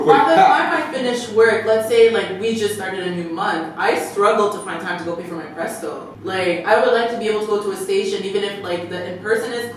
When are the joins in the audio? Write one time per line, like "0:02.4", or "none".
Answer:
0:06.1